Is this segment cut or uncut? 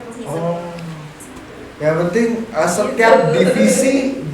cut